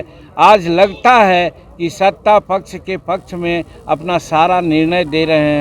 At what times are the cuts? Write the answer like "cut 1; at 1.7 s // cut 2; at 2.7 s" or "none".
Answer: none